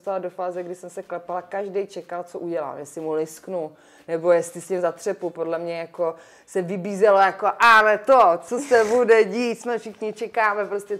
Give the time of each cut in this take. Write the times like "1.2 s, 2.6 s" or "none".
none